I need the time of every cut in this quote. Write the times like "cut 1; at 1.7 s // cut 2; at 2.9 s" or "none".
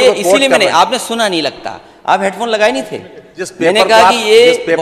none